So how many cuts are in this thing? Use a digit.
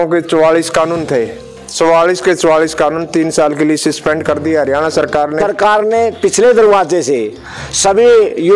1